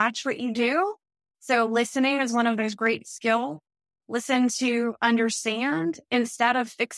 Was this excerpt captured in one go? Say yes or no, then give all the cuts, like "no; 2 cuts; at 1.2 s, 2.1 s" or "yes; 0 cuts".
yes; 0 cuts